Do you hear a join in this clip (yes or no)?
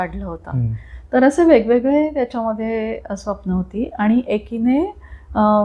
no